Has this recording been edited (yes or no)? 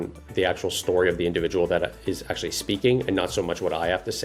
no